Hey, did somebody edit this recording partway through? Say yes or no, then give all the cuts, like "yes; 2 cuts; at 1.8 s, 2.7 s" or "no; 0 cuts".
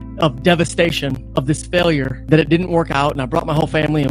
yes; 1 cut; at 2.1 s